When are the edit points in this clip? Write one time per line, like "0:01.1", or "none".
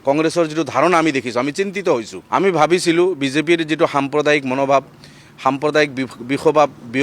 0:02.1